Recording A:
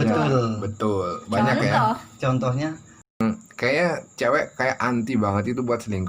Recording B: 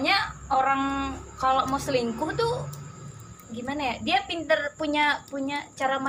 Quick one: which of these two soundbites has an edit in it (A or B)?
A